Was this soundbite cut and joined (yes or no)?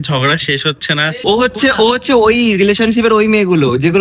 yes